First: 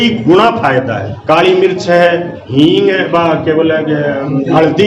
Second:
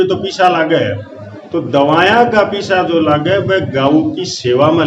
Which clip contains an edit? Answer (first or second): first